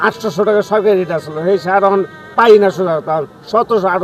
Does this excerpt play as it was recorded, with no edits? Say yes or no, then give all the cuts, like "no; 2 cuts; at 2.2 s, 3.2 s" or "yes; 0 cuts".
yes; 0 cuts